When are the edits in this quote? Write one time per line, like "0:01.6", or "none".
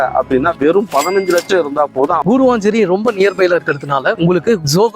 0:02.2
0:04.2